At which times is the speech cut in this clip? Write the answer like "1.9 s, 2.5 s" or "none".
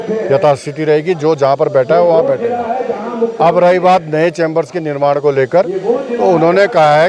none